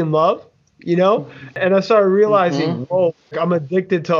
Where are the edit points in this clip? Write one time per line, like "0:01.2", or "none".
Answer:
0:01.6
0:03.2